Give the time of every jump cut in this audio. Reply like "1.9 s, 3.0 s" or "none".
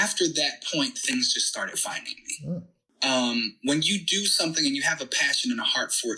2.8 s